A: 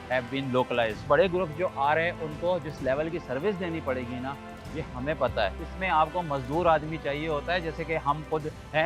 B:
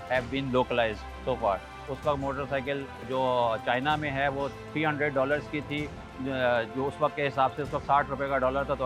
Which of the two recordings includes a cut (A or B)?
A